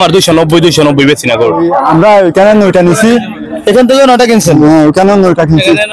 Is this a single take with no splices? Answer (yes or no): no